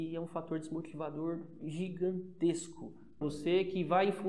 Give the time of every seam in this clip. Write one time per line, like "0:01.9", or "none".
0:03.2